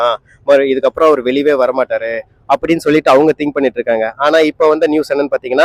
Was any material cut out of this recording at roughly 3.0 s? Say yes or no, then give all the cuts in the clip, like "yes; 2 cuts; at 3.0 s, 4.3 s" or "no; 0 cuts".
no; 0 cuts